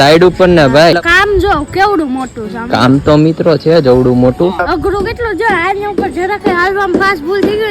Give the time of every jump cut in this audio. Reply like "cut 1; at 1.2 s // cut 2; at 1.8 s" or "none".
cut 1; at 0.9 s // cut 2; at 4.7 s